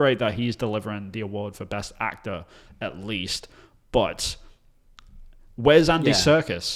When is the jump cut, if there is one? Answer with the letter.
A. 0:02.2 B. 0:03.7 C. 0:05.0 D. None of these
D